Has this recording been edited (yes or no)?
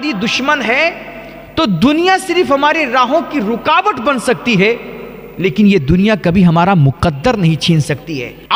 no